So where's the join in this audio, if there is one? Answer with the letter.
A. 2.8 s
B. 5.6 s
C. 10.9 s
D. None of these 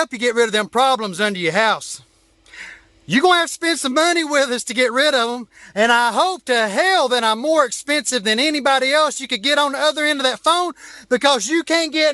D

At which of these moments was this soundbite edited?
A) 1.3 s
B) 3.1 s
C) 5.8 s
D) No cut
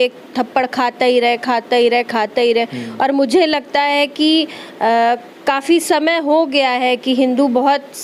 D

